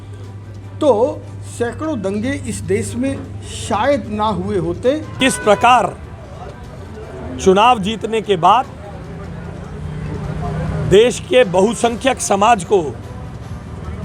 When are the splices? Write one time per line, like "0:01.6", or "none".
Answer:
0:05.1